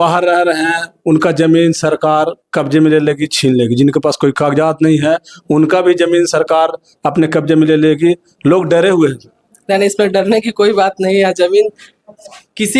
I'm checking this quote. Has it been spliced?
no; 0 cuts

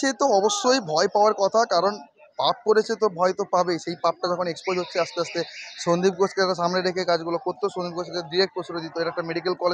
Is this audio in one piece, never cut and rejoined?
yes; 0 cuts

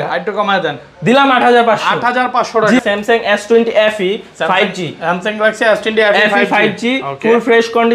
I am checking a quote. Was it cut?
yes; 1 cut; at 2.8 s

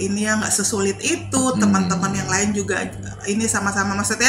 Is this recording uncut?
yes; 0 cuts

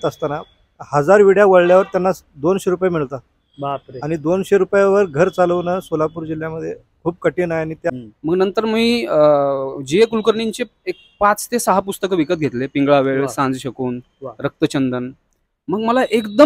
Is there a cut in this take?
yes; 1 cut; at 7.9 s

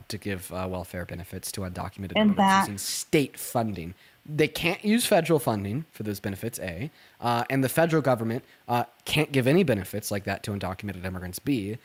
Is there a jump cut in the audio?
no; 0 cuts

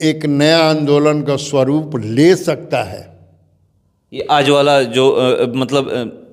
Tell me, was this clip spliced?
no; 0 cuts

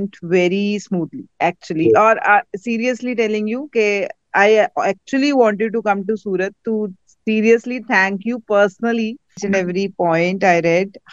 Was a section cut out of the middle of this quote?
yes; 1 cut; at 9.3 s

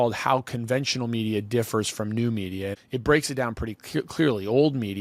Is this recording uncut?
no; 1 cut; at 2.8 s

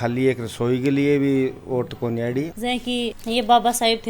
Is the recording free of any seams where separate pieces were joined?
no; 1 cut; at 2.6 s

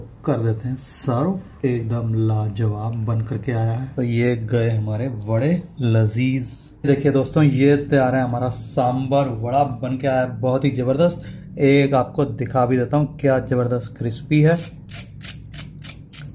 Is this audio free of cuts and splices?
no; 1 cut; at 3.8 s

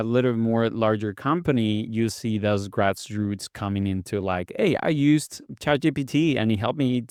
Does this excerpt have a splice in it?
no; 0 cuts

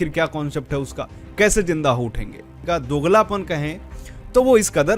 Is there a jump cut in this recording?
yes; 1 cut; at 2.6 s

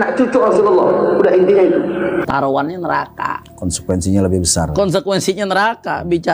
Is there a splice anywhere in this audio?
yes; 1 cut; at 2.3 s

